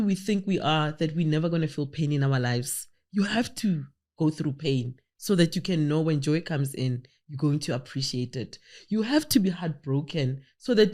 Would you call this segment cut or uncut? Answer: uncut